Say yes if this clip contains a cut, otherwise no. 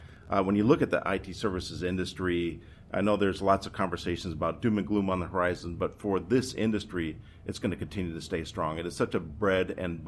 no